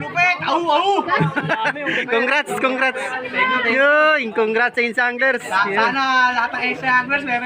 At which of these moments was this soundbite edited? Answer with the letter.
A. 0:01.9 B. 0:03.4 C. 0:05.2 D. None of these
D